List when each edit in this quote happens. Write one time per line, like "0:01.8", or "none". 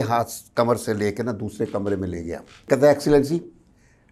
0:02.6